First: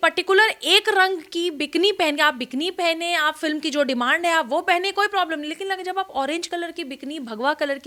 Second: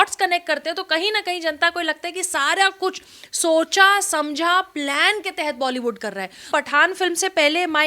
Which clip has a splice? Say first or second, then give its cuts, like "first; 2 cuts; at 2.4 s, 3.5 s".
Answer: second; 1 cut; at 6.5 s